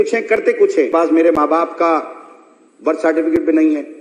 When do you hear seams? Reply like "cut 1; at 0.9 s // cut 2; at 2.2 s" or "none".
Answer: cut 1; at 0.9 s